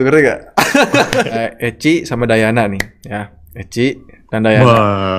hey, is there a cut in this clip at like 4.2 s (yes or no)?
no